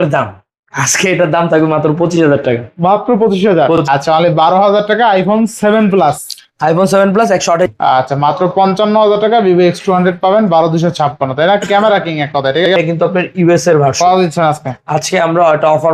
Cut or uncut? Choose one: cut